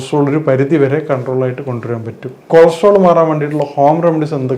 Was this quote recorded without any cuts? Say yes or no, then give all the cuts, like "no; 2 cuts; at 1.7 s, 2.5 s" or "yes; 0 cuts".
no; 1 cut; at 2.5 s